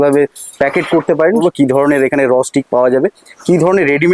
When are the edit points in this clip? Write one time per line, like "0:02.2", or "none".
0:01.4